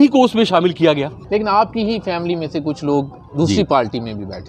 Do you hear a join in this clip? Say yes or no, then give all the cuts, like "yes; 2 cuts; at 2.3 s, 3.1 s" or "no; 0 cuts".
yes; 1 cut; at 1.2 s